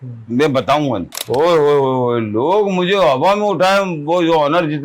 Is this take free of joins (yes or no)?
no